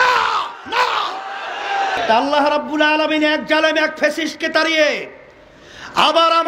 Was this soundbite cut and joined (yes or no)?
yes